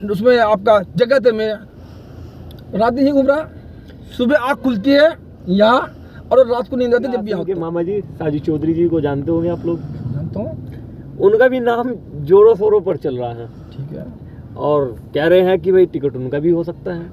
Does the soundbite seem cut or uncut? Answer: cut